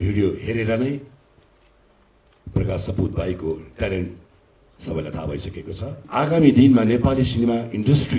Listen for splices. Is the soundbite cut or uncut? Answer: cut